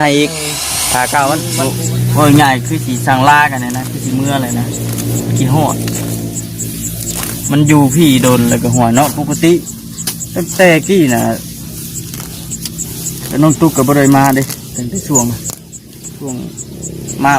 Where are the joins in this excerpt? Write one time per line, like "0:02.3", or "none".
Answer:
0:01.5